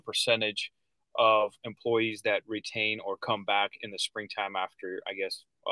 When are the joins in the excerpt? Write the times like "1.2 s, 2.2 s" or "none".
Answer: none